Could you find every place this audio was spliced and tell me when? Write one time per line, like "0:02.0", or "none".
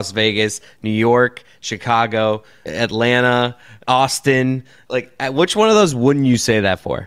0:02.6
0:03.7
0:04.8